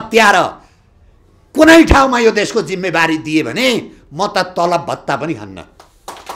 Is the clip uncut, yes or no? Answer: yes